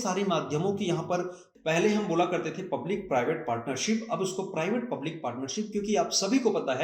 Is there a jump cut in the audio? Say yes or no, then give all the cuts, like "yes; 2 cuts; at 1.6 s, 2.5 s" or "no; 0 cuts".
yes; 1 cut; at 1.5 s